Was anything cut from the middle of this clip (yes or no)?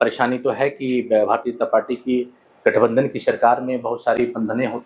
no